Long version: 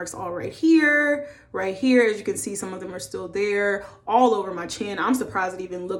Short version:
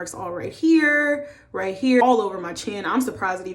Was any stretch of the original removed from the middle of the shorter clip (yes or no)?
yes